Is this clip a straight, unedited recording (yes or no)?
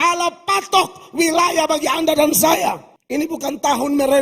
no